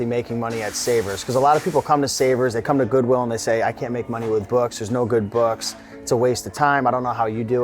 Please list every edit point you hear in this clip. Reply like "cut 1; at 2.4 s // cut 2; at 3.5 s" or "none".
none